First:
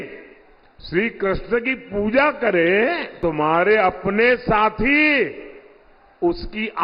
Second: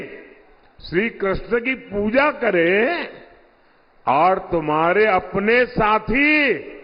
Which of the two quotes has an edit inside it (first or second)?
first